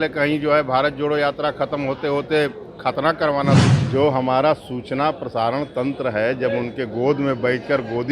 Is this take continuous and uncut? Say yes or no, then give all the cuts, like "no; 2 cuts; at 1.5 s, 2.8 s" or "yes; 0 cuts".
no; 1 cut; at 3.7 s